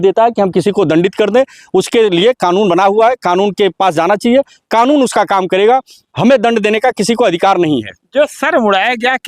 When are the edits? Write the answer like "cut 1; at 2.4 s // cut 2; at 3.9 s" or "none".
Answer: none

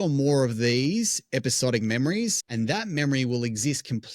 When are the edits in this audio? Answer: cut 1; at 2.4 s

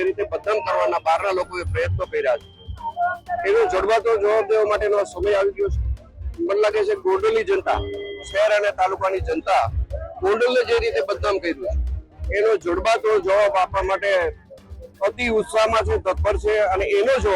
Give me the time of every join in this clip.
none

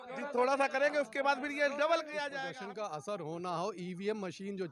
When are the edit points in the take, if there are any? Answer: cut 1; at 2.2 s

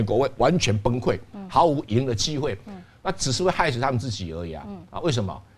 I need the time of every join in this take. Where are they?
none

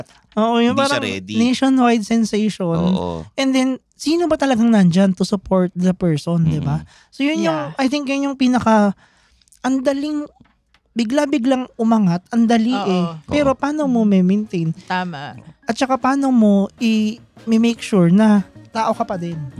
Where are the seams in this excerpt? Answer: cut 1; at 18.6 s

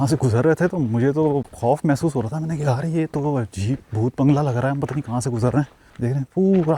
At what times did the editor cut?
cut 1; at 1.5 s // cut 2; at 5.8 s

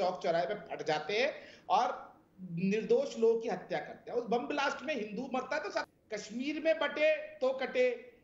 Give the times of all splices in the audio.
cut 1; at 5.9 s

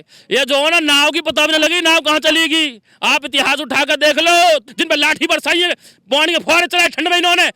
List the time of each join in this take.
cut 1; at 4.7 s

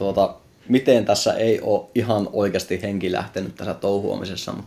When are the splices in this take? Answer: none

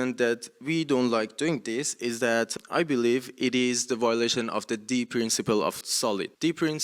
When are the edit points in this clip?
cut 1; at 2.5 s // cut 2; at 6.0 s

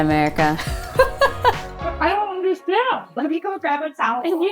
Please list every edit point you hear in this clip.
cut 1; at 1.9 s

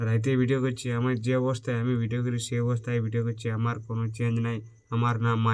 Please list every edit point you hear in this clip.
none

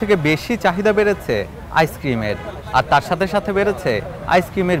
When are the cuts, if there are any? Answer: none

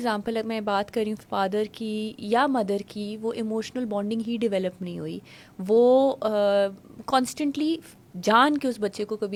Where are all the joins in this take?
none

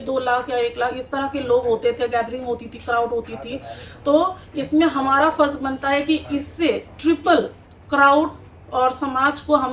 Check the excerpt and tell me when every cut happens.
none

